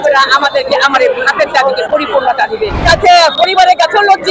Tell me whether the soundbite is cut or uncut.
cut